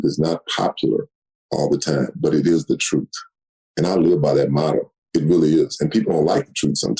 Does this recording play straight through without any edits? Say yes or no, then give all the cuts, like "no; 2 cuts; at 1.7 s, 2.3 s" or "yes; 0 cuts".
yes; 0 cuts